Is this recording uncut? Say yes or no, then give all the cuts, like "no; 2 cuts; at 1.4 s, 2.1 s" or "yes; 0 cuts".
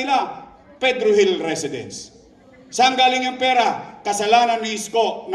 yes; 0 cuts